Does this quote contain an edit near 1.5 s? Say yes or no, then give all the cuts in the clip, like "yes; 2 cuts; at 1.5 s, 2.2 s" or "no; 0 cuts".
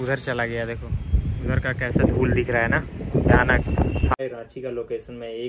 no; 1 cut; at 4.1 s